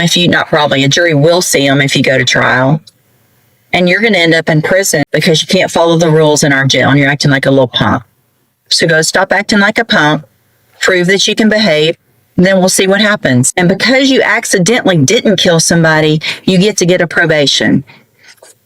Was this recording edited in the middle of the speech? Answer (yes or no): yes